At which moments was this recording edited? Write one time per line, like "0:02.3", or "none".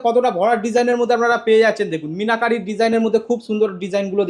none